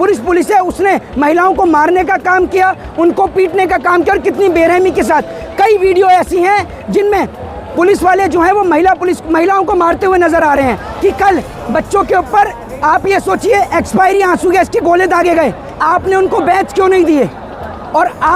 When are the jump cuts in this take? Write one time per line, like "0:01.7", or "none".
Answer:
0:10.9
0:15.8